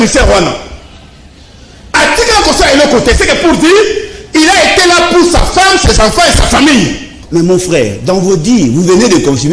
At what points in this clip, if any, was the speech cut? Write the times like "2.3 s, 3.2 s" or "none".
7.1 s